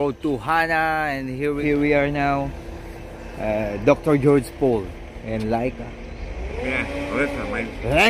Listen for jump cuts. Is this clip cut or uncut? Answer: cut